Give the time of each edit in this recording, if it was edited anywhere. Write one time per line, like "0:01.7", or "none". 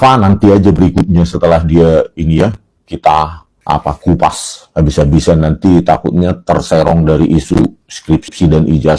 0:03.5